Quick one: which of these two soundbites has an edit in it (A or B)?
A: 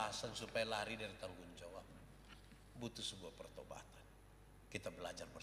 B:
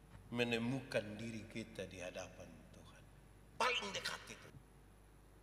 B